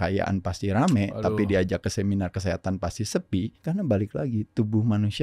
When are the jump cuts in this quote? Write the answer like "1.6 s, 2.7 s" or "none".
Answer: 3.6 s